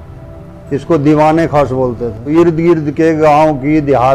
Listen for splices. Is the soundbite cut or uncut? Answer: cut